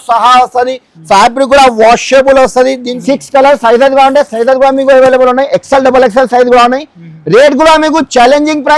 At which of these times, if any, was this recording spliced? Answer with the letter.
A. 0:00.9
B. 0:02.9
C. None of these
B